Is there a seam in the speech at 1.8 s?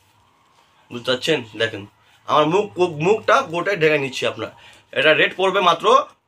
no; 0 cuts

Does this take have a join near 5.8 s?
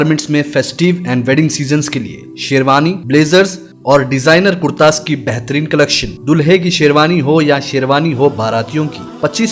no; 0 cuts

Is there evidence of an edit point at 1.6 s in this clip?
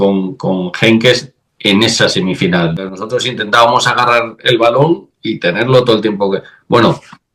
no; 1 cut; at 2.9 s

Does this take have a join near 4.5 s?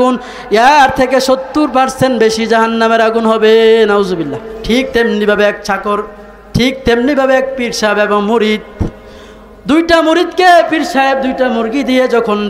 yes; 1 cut; at 4.5 s

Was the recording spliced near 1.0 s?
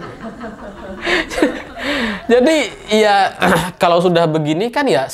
yes; 1 cut; at 1.0 s

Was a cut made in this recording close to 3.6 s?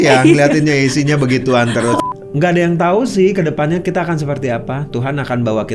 no; 1 cut; at 2.0 s

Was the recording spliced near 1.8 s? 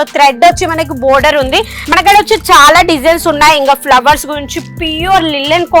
yes; 1 cut; at 1.8 s

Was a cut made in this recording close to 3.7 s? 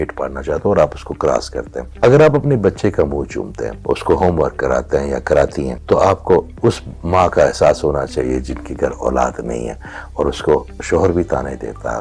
yes; 3 cuts; at 1.8 s, 3.7 s, 5.7 s

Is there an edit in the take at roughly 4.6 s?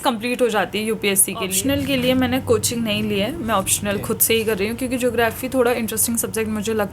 no; 1 cut; at 1.5 s

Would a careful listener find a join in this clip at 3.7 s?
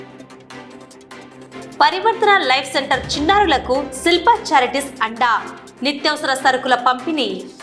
no; 1 cut; at 1.4 s

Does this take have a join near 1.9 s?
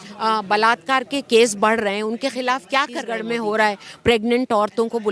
no; 1 cut; at 3.2 s

